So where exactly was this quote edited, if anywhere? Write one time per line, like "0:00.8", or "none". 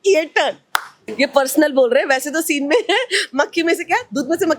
0:01.0